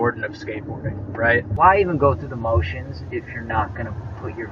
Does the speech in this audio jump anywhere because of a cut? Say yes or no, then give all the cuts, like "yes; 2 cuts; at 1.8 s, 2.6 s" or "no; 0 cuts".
yes; 1 cut; at 1.5 s